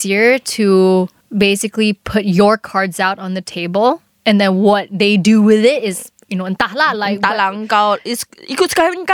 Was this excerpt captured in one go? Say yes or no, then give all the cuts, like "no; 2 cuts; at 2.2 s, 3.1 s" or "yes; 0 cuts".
yes; 0 cuts